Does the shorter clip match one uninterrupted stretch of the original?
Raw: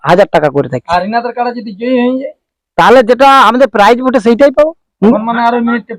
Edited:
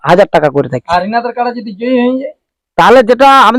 yes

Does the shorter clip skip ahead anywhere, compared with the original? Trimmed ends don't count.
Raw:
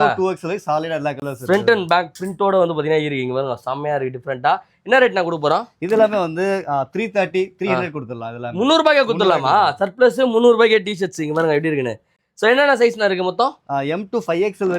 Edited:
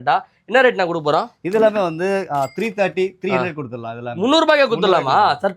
no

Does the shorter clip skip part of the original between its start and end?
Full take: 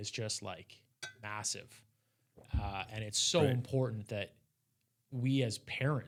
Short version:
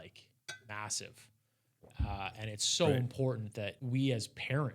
yes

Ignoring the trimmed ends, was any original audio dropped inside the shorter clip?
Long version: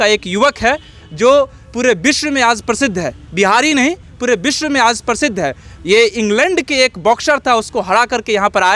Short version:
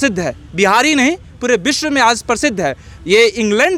no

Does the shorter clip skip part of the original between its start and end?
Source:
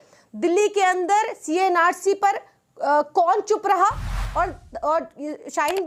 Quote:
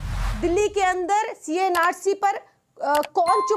no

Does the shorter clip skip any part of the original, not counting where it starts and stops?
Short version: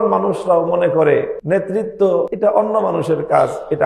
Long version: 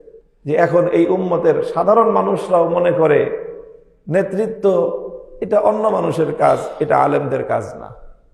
yes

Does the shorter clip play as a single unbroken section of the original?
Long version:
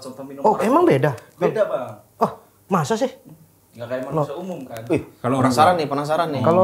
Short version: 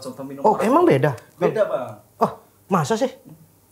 yes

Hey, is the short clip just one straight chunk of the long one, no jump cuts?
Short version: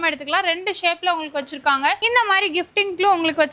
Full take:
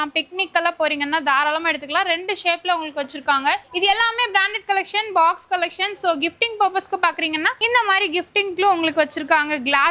no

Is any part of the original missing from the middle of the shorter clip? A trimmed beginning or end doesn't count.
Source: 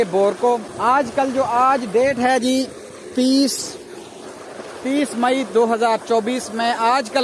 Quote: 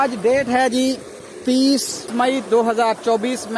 yes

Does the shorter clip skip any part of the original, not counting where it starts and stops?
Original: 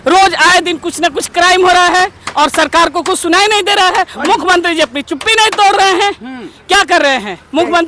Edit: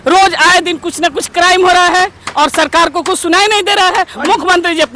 no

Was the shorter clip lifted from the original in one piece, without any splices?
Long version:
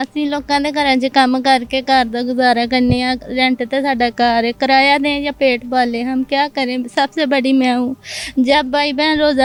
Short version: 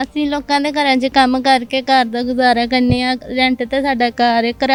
yes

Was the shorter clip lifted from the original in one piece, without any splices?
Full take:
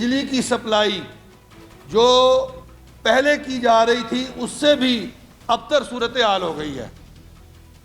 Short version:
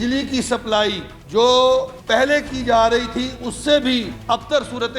no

